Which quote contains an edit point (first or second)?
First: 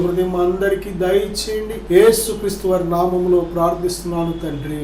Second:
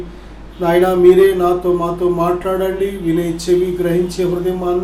first